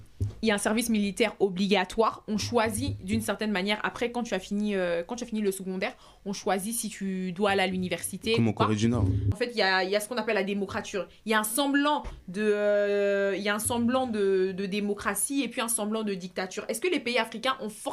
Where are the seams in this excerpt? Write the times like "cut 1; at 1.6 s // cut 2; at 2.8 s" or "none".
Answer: cut 1; at 9.3 s